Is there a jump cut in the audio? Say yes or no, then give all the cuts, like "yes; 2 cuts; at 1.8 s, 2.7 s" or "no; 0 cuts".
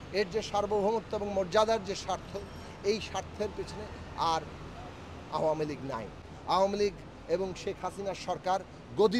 no; 0 cuts